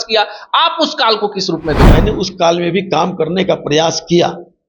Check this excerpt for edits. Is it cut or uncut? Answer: cut